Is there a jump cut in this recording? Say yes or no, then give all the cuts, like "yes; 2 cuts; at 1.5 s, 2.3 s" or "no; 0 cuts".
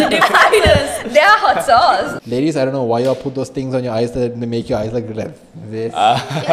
yes; 1 cut; at 2.2 s